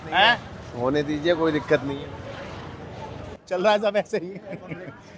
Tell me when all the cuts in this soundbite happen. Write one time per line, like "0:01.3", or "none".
none